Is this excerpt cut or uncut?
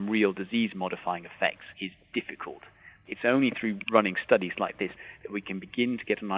cut